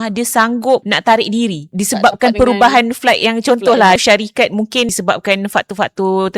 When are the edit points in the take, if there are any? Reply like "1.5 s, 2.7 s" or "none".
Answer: 0.9 s, 1.6 s, 4.0 s, 4.9 s